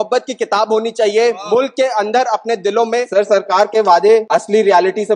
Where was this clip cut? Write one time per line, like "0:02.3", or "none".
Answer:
0:03.1
0:04.3